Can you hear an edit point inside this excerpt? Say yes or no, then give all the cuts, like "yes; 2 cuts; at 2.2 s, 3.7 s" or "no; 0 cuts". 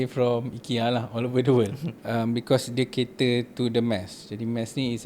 yes; 1 cut; at 1.9 s